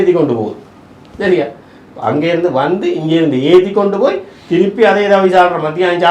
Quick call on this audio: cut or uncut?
uncut